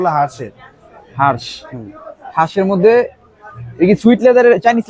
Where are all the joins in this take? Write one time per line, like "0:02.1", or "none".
none